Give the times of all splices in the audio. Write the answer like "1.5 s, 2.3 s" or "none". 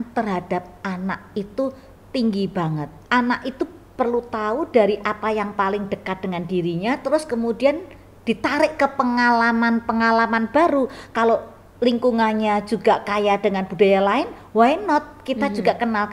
2.9 s

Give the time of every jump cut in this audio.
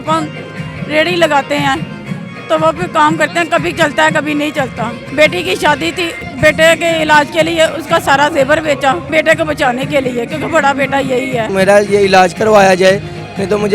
5.0 s, 6.2 s, 9.0 s, 11.5 s

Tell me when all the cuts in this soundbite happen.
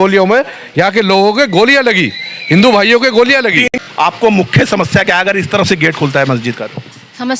3.7 s

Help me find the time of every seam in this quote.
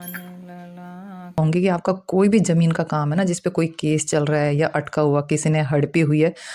1.4 s

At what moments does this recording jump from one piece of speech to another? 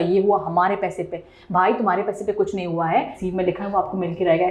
3.2 s

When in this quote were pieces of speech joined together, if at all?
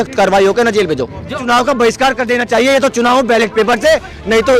1.4 s

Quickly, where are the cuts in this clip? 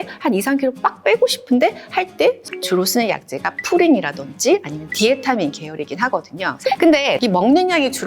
2.4 s, 6.4 s

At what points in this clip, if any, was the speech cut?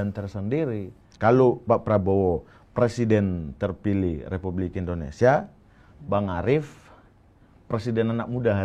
1.0 s

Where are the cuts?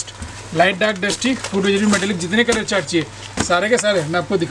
none

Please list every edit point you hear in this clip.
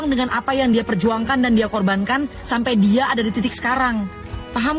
none

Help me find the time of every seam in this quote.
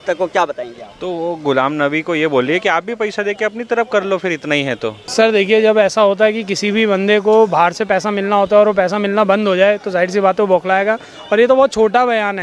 5.0 s

